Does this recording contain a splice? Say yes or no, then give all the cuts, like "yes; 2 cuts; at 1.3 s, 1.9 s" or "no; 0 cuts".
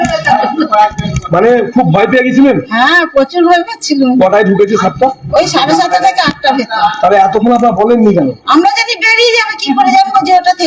no; 0 cuts